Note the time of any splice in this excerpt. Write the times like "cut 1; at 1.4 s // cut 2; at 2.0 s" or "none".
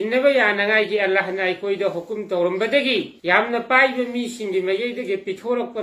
cut 1; at 3.5 s